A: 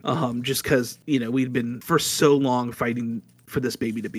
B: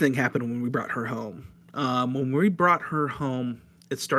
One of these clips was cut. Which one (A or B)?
A